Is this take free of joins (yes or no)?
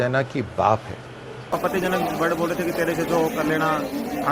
no